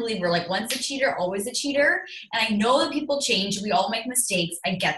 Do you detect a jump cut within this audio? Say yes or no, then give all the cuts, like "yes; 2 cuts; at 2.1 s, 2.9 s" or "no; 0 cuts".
no; 0 cuts